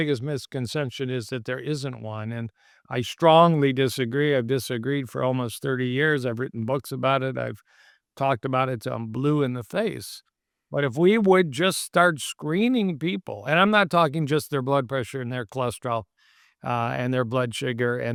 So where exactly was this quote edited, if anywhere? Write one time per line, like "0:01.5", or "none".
none